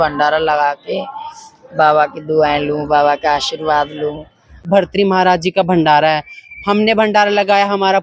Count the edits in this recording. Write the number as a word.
one